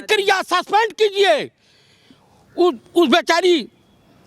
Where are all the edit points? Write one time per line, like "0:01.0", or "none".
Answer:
none